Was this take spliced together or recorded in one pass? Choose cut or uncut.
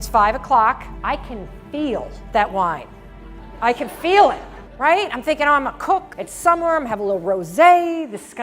cut